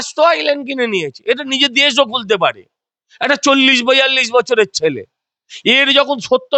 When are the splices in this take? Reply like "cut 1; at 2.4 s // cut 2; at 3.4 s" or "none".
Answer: none